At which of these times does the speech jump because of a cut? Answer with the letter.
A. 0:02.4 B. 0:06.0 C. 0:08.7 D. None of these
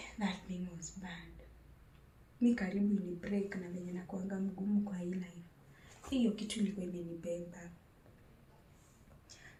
D